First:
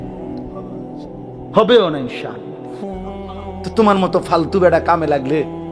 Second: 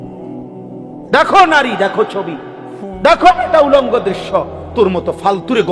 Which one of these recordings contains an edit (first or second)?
second